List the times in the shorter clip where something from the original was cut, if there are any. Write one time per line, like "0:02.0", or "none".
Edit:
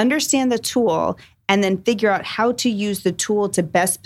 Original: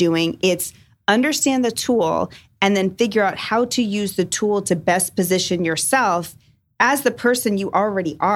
none

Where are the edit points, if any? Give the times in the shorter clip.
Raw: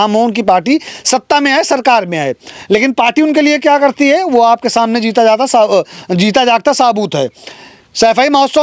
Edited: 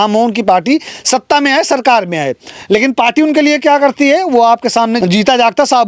0:05.0

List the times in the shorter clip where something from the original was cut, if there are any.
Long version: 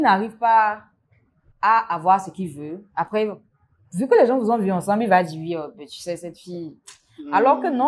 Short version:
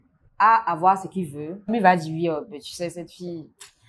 0:01.7

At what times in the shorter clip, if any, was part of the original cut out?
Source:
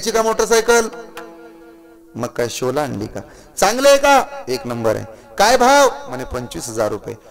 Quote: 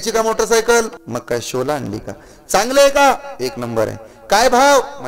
0:01.0

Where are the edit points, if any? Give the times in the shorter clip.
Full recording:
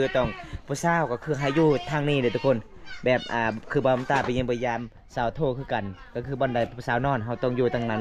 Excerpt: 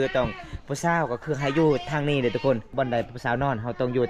0:02.7

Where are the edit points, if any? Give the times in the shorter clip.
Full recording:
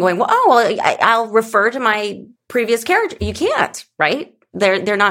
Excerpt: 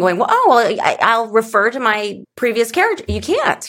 0:02.2

